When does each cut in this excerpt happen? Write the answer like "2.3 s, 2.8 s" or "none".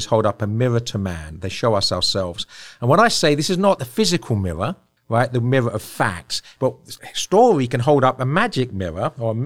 3.8 s, 4.9 s, 6.6 s